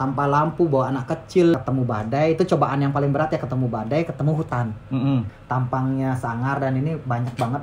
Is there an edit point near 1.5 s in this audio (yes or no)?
yes